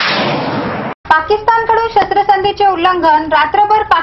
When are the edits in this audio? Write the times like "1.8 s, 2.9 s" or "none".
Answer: 0.9 s